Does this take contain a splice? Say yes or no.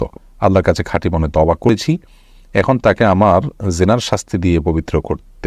yes